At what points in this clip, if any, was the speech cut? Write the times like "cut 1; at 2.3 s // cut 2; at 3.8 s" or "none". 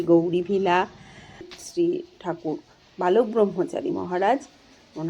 cut 1; at 1.5 s